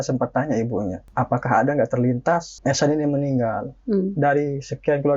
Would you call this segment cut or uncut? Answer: cut